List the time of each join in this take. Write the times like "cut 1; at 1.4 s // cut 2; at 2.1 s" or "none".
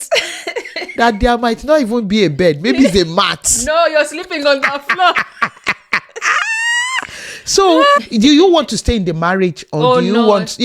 cut 1; at 8.0 s